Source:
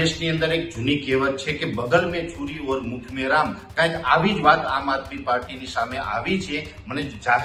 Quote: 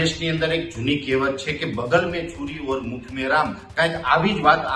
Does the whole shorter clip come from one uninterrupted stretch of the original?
yes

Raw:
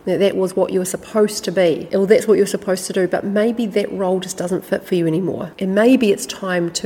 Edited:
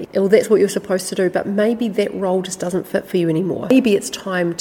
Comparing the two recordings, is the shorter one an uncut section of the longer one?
no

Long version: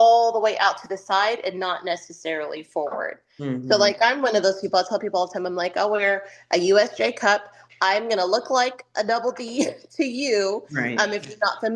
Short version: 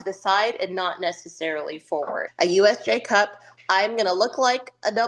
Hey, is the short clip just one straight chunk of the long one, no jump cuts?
no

